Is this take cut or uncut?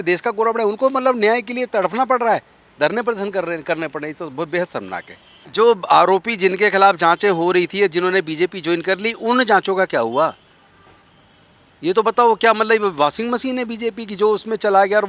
cut